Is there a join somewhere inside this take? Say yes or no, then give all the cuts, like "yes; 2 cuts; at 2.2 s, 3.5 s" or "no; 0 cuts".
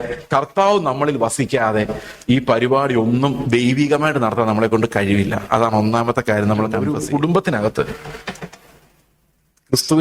yes; 1 cut; at 6.8 s